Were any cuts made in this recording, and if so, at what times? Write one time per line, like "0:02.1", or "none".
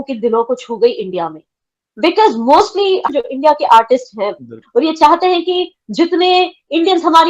0:03.1
0:04.6